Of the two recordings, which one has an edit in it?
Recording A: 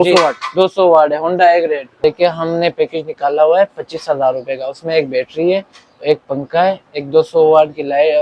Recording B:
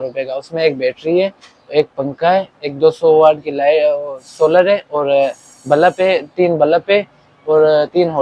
A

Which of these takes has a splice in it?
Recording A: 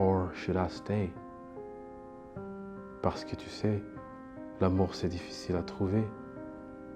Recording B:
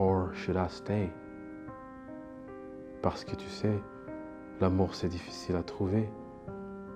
A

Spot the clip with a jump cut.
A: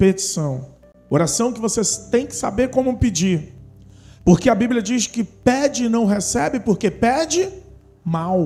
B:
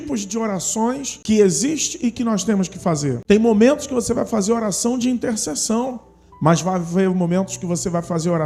B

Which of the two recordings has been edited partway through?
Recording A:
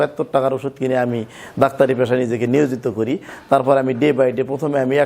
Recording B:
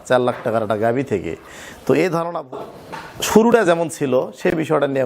B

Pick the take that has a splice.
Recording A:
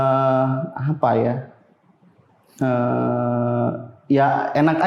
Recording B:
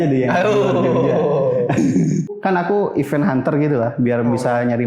B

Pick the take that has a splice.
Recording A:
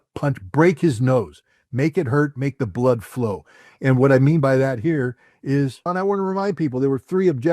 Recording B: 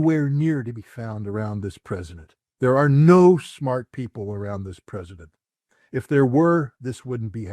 A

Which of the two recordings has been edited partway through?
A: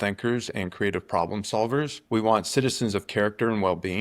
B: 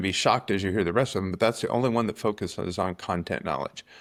A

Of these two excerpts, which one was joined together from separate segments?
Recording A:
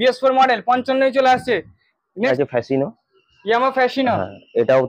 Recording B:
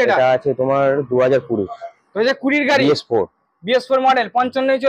A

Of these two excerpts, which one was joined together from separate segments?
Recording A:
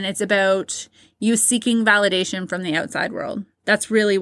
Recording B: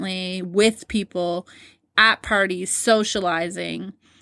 B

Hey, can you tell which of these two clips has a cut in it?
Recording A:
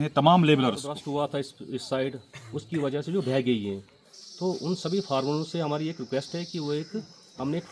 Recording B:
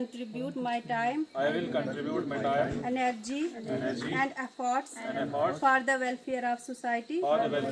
A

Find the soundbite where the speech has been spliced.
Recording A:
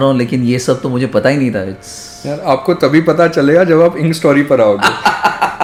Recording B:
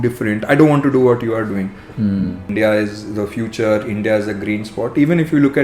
B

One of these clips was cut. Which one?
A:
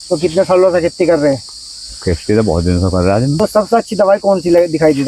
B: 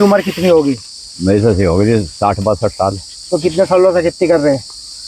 A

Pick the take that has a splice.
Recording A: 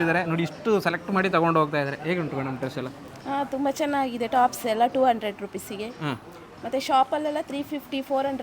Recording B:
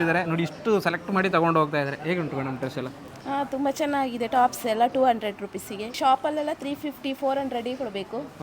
B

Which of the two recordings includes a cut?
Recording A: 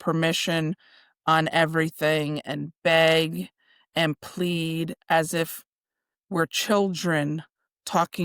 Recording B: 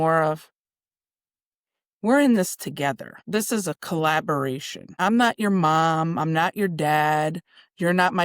B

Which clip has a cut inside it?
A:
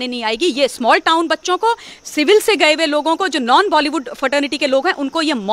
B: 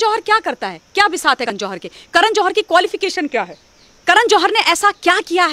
B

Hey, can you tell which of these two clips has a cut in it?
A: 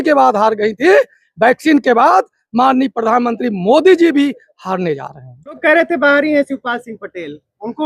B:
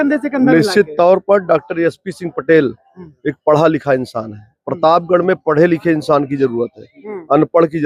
A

